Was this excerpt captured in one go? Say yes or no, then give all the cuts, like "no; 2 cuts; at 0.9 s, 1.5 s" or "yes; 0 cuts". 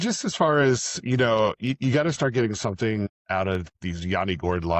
no; 1 cut; at 3.5 s